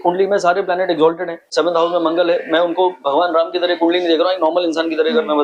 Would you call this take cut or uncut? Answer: cut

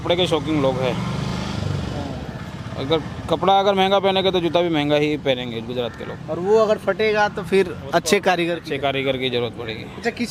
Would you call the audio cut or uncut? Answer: uncut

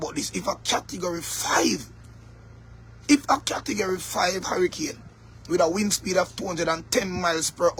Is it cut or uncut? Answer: uncut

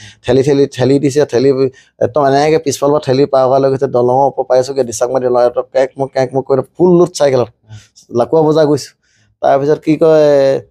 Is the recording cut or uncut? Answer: uncut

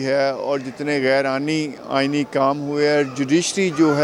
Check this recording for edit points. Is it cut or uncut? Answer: uncut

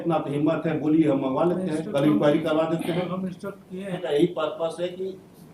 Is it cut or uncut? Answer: cut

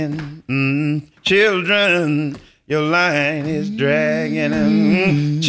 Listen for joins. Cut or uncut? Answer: uncut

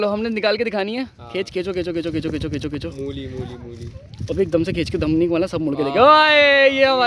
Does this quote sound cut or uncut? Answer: uncut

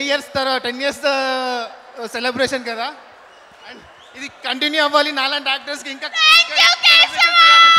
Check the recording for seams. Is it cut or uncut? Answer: uncut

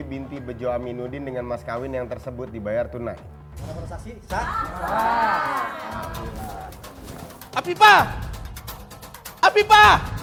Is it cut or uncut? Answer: uncut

